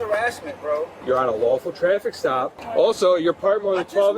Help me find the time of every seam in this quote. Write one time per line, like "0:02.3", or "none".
0:01.0
0:02.6